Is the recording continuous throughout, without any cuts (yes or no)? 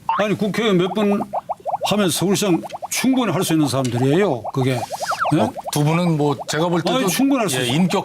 no